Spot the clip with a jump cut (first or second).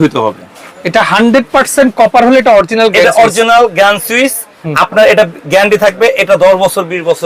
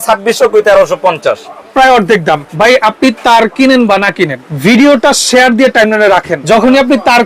second